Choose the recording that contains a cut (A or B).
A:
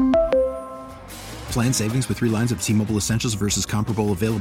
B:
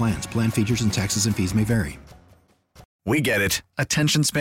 B